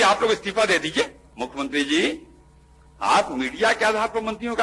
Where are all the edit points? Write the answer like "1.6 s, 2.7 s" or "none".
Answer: 1.2 s